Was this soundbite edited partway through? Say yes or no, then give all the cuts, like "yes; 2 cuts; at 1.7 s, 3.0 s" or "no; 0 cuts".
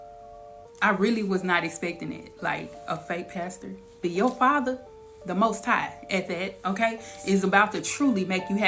yes; 1 cut; at 4.0 s